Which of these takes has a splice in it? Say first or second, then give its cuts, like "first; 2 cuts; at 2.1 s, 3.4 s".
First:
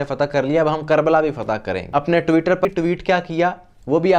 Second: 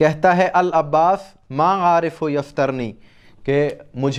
first; 2 cuts; at 1.8 s, 2.6 s